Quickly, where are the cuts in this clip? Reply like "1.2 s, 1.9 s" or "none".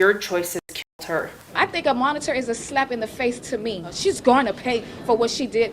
1.4 s, 3.9 s